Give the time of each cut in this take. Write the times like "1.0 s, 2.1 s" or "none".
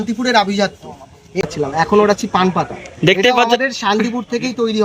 1.4 s